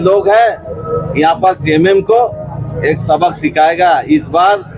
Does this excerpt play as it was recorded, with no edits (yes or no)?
yes